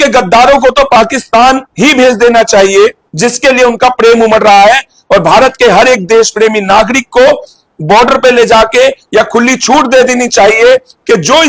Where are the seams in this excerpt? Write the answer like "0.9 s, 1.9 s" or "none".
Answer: 1.7 s, 3.1 s